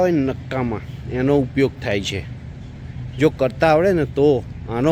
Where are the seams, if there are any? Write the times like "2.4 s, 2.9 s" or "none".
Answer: none